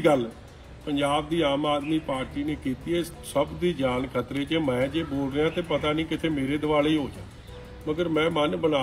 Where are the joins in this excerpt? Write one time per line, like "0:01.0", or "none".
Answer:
0:03.1